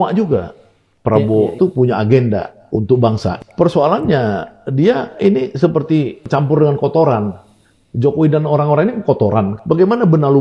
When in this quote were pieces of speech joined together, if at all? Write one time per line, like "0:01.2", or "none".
none